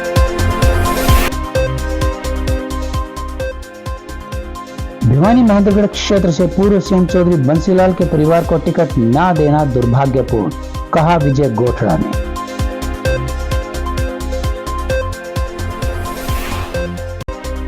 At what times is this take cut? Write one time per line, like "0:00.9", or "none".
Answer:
0:01.2